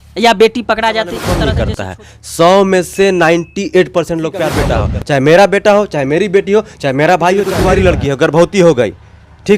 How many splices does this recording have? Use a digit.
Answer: 3